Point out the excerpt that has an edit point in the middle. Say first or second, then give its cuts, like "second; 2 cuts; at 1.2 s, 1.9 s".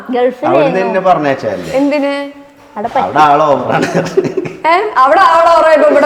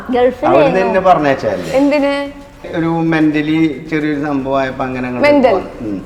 second; 1 cut; at 2.7 s